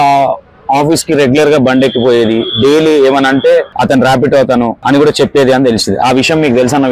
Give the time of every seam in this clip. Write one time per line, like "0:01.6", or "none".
0:03.7
0:04.8